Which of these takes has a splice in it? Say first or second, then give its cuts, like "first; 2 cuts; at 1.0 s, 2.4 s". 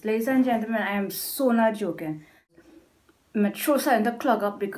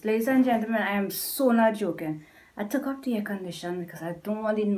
first; 1 cut; at 2.6 s